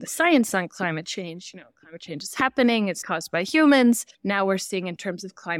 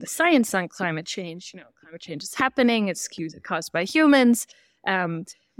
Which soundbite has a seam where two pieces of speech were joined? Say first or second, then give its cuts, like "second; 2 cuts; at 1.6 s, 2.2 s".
first; 2 cuts; at 3.1 s, 4.1 s